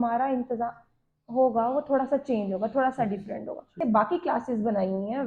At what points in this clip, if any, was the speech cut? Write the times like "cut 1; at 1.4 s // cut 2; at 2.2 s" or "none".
cut 1; at 3.8 s